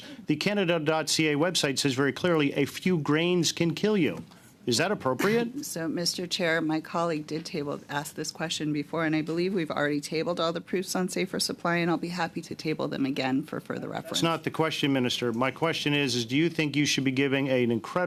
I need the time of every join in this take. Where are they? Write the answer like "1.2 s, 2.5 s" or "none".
none

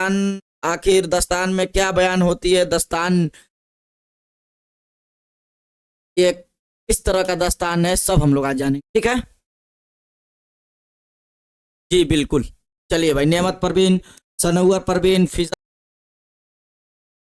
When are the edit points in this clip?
none

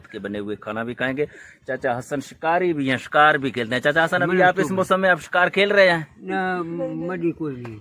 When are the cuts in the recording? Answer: none

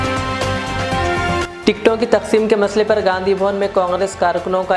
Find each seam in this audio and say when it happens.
1.5 s

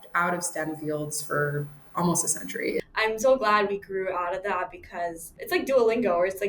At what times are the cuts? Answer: 2.8 s, 5.3 s

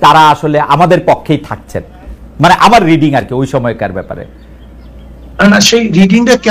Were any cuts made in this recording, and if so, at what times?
none

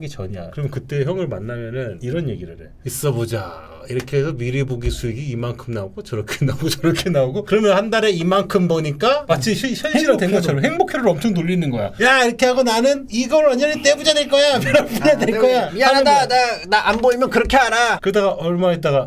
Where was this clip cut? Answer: 7.4 s, 9.2 s, 17.9 s

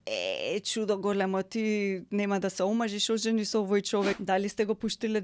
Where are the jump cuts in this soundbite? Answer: 4.2 s

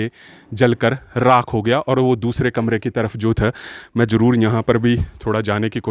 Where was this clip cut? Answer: none

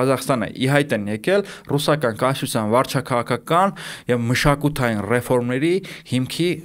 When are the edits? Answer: none

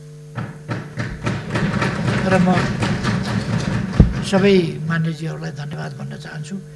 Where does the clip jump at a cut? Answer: none

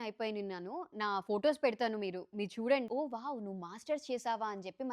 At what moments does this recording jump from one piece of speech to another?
2.9 s

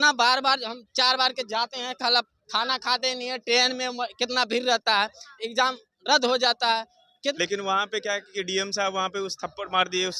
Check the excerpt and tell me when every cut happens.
7.3 s

